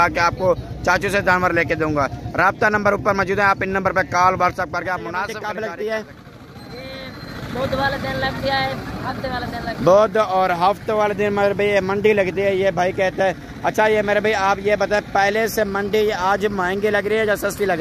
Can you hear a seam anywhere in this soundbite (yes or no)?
yes